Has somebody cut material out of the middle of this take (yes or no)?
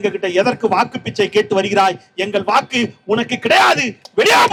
no